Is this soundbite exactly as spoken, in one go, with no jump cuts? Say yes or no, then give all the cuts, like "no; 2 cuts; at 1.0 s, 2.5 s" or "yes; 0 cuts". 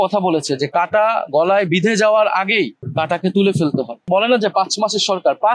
no; 1 cut; at 4.1 s